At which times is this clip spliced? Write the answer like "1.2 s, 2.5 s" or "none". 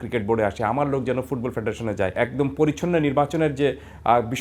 2.2 s

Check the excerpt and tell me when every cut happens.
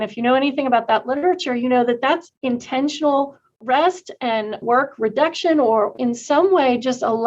2.3 s, 4.6 s, 5.9 s

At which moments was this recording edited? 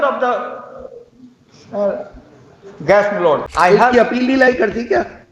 3.5 s

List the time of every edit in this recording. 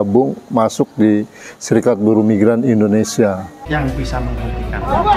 3.6 s

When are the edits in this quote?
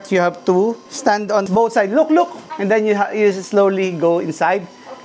1.4 s, 2.5 s

